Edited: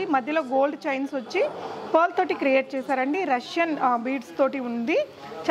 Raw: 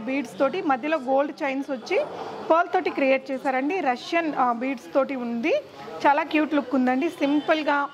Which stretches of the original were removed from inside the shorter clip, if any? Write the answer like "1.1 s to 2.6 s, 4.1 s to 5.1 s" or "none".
none